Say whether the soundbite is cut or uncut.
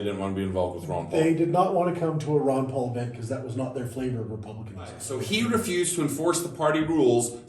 cut